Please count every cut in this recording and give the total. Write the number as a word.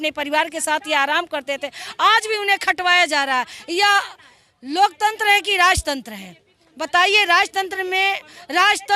zero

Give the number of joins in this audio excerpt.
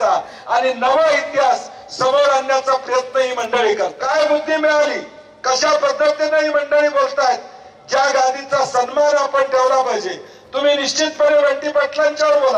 one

